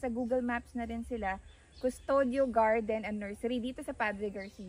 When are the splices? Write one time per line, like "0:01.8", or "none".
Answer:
none